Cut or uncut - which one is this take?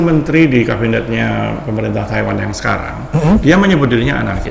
uncut